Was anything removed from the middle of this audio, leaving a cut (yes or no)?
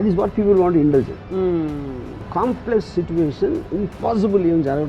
yes